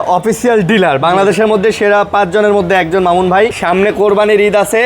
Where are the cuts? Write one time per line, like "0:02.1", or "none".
0:03.6